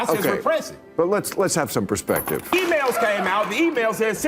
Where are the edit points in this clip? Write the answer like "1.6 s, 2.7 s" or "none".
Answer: 2.5 s